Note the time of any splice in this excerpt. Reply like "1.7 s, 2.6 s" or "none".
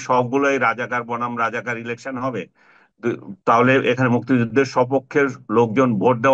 none